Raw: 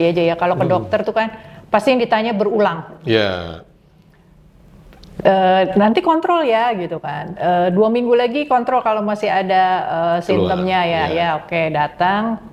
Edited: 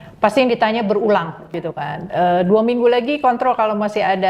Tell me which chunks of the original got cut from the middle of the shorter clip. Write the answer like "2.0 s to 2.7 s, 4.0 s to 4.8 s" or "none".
3.0 s to 6.8 s